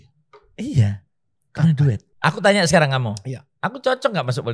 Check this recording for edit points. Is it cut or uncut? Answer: cut